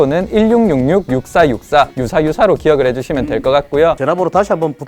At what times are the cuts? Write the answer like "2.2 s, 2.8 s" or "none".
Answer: 2.0 s, 4.0 s